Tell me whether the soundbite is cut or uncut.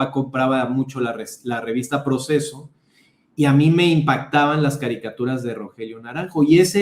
uncut